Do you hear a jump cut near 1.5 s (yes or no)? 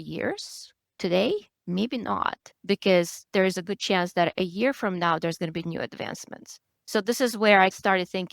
no